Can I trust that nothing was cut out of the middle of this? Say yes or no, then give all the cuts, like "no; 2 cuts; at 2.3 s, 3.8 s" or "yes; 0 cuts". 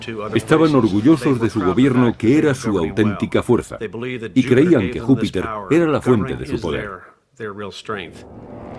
no; 1 cut; at 5.0 s